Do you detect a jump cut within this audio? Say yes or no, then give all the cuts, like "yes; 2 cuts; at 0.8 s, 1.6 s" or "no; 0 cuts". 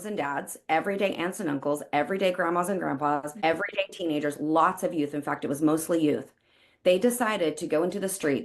yes; 1 cut; at 3.3 s